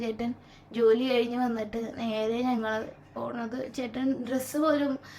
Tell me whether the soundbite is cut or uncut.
uncut